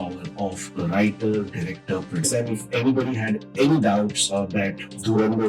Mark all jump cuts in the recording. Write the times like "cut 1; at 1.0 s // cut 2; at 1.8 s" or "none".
cut 1; at 2.3 s